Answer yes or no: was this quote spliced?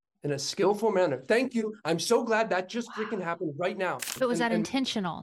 yes